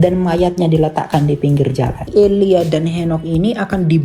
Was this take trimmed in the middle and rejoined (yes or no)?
yes